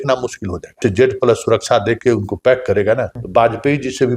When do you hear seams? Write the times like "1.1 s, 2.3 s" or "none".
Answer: 0.8 s, 3.1 s